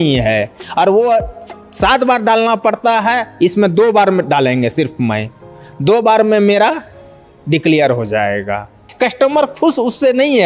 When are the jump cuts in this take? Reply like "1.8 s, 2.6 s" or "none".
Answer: 8.9 s